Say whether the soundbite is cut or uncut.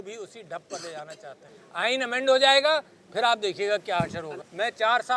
cut